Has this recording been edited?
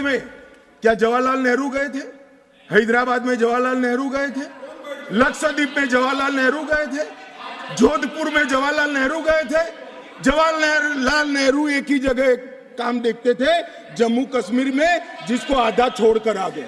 no; 0 cuts

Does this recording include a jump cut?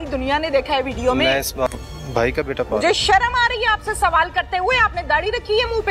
yes; 1 cut; at 1.7 s

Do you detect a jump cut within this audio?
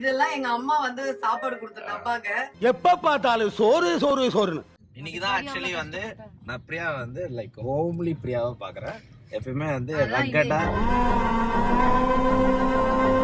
yes; 1 cut; at 4.6 s

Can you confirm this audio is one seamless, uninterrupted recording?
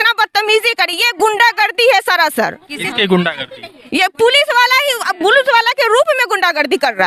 yes; 0 cuts

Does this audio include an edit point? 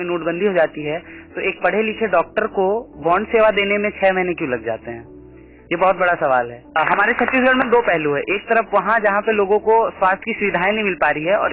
no; 0 cuts

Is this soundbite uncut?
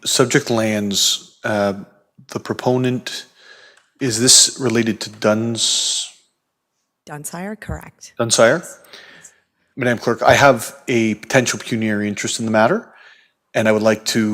yes; 0 cuts

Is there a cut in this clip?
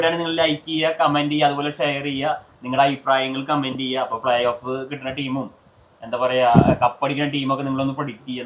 no; 0 cuts

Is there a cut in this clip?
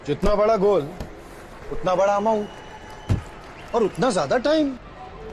no; 0 cuts

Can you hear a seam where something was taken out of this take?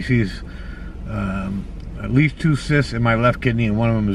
no; 0 cuts

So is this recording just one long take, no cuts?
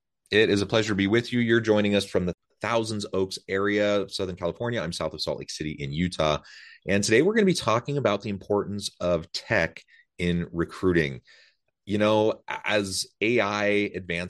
no; 1 cut; at 2.3 s

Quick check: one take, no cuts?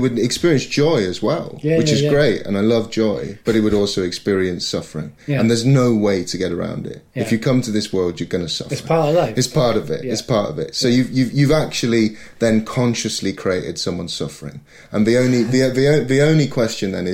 yes; 0 cuts

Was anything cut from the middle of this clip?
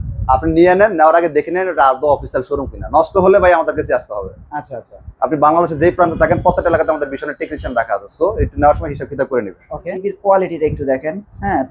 yes; 1 cut; at 9.7 s

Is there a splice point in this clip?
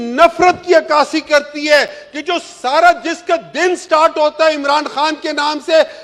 no; 0 cuts

